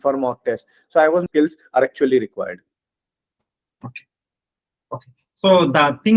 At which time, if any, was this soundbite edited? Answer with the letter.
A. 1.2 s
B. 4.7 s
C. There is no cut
A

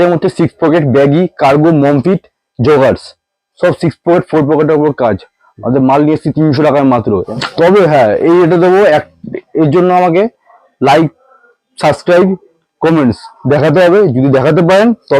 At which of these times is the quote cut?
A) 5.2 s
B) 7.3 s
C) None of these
B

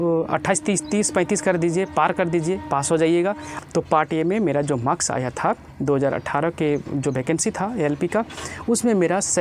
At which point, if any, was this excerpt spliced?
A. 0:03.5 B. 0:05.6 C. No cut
A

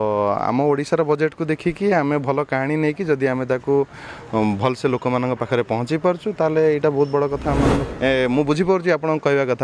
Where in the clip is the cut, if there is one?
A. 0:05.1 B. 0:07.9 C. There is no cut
B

